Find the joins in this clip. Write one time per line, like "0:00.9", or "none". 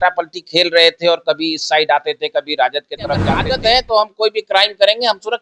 0:03.3